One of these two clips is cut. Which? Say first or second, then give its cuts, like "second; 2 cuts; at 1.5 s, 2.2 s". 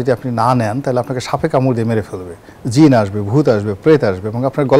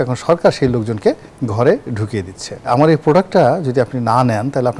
second; 1 cut; at 2.7 s